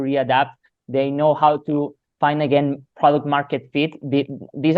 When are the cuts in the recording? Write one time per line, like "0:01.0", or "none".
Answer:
none

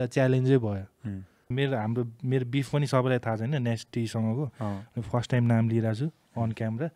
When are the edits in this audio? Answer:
0:01.5

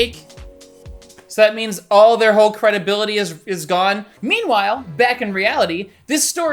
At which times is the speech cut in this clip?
0:04.1

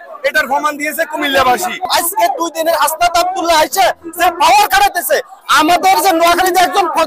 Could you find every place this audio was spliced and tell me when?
0:01.9

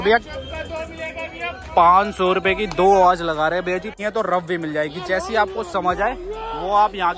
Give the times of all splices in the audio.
0:04.0

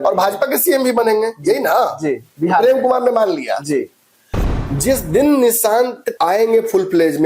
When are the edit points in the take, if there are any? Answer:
0:04.6
0:06.0

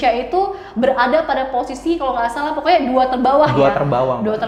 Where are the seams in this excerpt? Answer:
none

